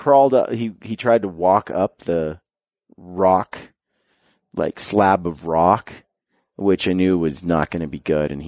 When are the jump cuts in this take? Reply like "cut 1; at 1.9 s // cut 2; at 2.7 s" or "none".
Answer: none